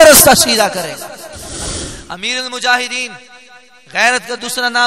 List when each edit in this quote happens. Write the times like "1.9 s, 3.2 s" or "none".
1.6 s